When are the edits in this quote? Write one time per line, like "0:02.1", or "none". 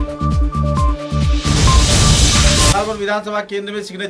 0:02.7

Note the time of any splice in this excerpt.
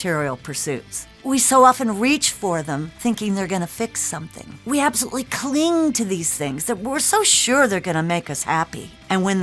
none

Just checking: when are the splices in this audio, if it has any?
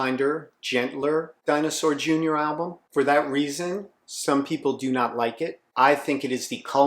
0:01.3

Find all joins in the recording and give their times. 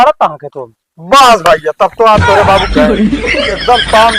none

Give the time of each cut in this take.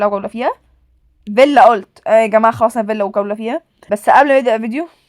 0:03.7

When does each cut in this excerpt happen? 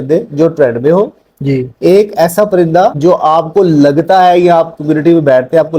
0:03.0

